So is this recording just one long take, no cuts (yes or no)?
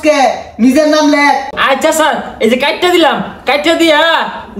no